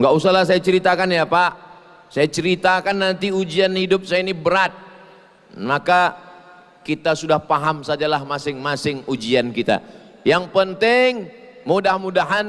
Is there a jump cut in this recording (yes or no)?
no